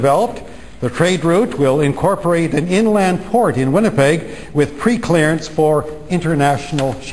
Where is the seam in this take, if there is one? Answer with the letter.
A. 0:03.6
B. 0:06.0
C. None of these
C